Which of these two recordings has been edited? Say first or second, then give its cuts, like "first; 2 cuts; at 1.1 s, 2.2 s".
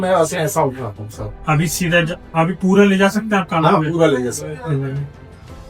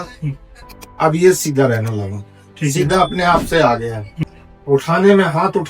second; 1 cut; at 4.1 s